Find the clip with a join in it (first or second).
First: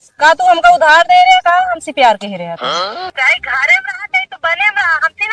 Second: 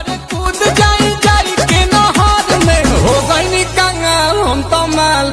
first